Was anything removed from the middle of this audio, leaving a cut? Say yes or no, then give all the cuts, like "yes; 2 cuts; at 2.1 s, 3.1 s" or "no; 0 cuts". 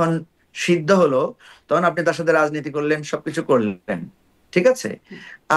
no; 0 cuts